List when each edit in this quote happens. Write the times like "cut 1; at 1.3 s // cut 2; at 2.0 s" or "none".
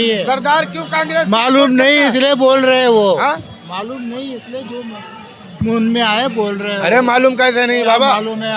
none